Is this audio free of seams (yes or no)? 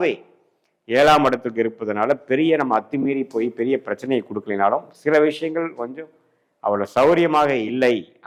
yes